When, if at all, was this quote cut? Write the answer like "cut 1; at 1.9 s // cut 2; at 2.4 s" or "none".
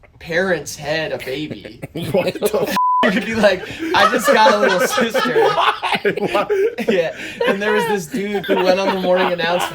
cut 1; at 8.4 s